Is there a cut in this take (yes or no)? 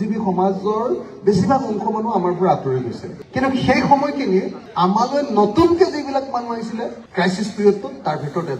no